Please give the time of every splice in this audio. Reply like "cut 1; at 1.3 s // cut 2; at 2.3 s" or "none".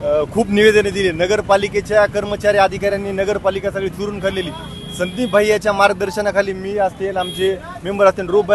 none